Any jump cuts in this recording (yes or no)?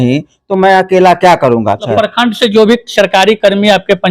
yes